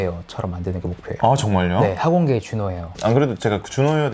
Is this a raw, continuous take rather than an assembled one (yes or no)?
no